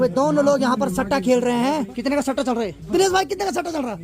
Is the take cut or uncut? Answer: cut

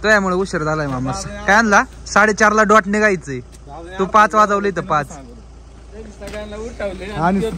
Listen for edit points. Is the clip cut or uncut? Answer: uncut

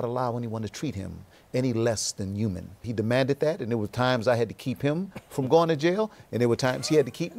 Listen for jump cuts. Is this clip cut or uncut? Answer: cut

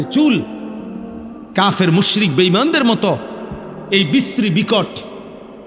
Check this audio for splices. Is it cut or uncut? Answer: uncut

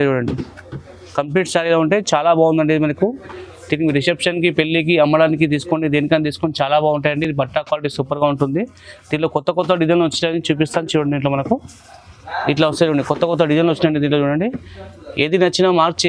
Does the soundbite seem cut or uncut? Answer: uncut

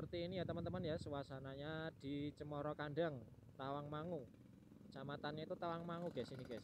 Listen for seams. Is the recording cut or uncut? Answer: uncut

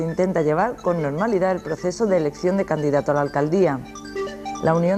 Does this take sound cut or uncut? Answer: uncut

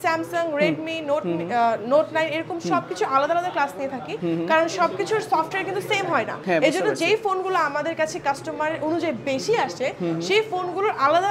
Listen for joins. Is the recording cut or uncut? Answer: uncut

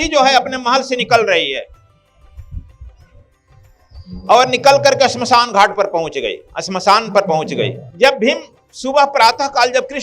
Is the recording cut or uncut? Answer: cut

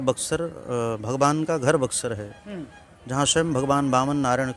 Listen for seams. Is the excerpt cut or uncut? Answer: uncut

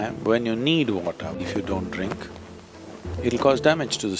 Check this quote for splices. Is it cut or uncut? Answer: cut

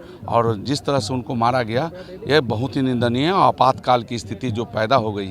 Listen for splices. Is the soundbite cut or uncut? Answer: uncut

